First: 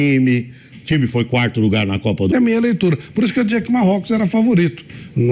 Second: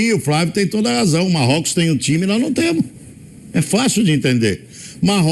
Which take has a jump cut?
first; 1 cut; at 2.3 s

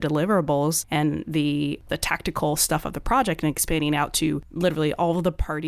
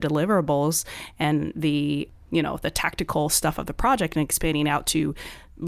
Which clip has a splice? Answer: first; 3 cuts; at 0.8 s, 1.8 s, 4.5 s

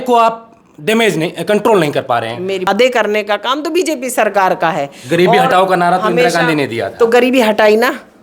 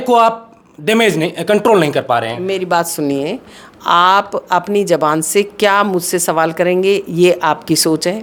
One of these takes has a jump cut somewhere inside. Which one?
first; 1 cut; at 2.7 s

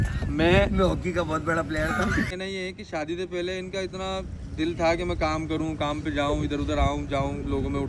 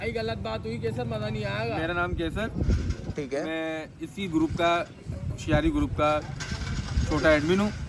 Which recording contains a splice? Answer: first; 1 cut; at 2.4 s

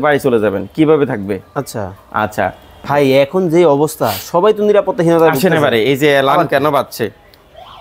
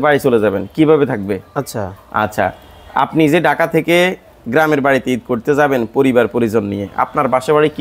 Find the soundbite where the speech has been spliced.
first; 1 cut; at 2.8 s

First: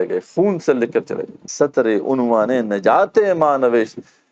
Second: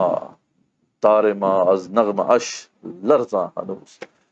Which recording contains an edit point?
first; 1 cut; at 1.4 s

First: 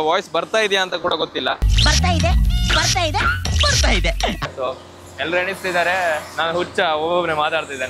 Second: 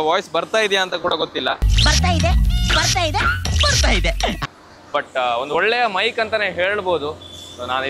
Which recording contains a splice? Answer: first; 1 cut; at 4.5 s

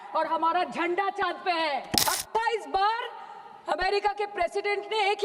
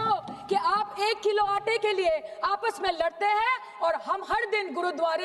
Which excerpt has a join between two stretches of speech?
first; 1 cut; at 2.0 s

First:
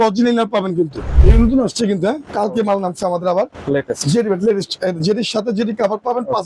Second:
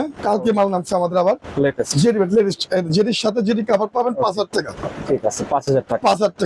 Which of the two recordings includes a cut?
first; 1 cut; at 1.2 s

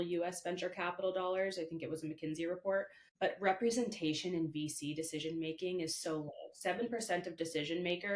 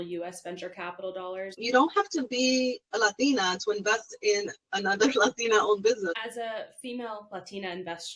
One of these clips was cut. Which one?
second; 2 cuts; at 1.6 s, 6.2 s

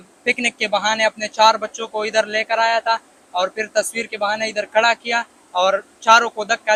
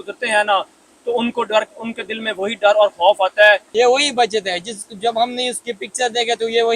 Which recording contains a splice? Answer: second; 1 cut; at 3.7 s

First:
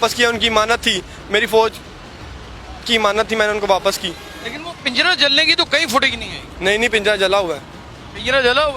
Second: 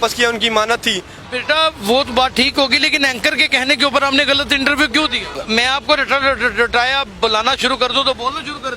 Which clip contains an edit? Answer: second; 2 cuts; at 1.1 s, 5.3 s

